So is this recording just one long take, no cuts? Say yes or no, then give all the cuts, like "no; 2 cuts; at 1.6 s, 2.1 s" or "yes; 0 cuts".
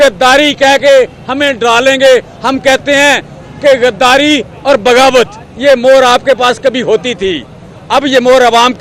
yes; 0 cuts